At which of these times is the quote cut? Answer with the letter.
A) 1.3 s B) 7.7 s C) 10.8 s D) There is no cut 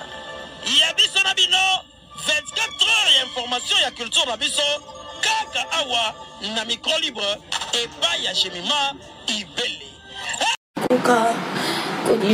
C